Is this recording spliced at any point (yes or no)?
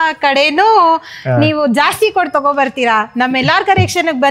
no